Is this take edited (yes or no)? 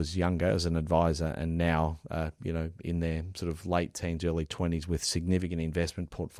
no